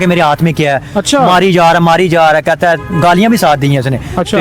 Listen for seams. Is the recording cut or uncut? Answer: uncut